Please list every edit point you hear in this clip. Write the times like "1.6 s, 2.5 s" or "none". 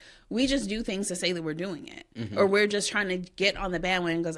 none